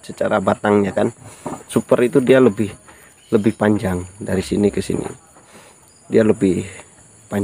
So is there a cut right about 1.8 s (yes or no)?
yes